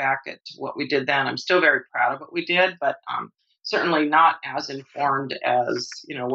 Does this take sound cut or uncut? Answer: uncut